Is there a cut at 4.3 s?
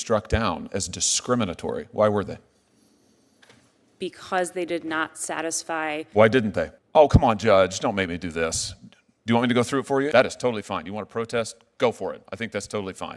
no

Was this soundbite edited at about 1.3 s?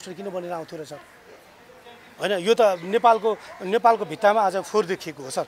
no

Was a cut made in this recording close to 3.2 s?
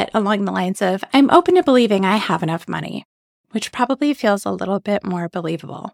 no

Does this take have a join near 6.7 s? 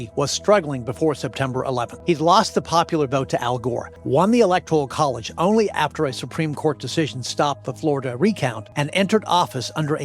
no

